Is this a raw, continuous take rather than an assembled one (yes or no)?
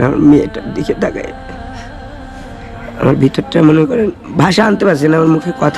yes